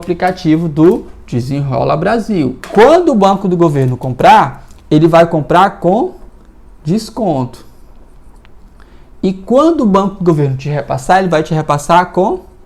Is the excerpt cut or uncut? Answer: cut